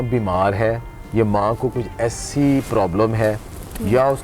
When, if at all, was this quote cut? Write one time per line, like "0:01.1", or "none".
none